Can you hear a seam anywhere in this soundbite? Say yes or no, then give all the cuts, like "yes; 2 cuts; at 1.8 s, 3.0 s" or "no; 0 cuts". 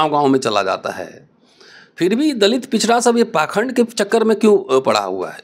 no; 0 cuts